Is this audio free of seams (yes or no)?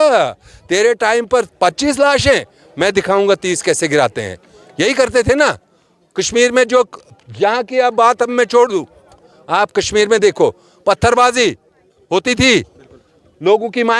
yes